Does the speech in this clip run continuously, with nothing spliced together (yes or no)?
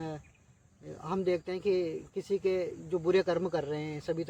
yes